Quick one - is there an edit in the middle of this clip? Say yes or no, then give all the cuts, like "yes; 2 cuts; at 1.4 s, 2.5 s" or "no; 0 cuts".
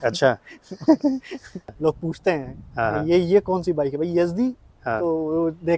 yes; 1 cut; at 1.7 s